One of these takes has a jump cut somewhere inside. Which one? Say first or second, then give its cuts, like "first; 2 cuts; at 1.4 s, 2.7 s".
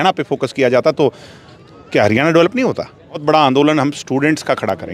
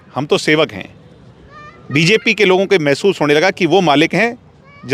first; 1 cut; at 3.2 s